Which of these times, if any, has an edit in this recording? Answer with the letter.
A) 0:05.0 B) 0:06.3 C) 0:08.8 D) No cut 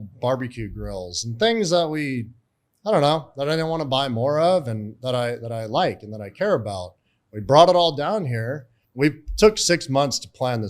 C